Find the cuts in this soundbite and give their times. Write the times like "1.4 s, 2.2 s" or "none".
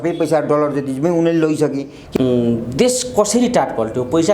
2.0 s